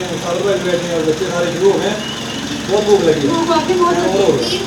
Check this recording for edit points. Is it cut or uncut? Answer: uncut